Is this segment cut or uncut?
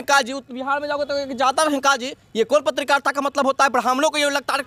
uncut